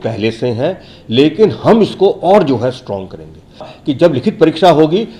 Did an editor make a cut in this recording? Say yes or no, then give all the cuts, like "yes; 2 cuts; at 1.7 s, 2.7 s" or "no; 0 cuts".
yes; 1 cut; at 3.7 s